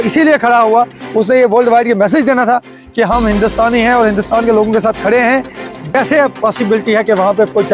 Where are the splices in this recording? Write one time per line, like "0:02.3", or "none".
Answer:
0:05.9